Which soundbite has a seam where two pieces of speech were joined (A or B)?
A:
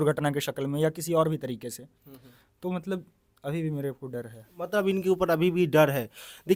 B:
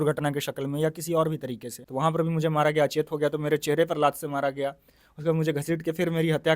B